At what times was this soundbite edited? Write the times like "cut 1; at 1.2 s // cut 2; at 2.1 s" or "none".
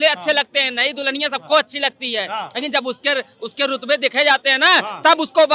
none